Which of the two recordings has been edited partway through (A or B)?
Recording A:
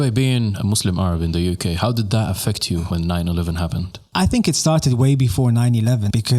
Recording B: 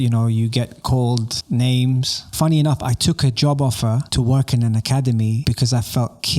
B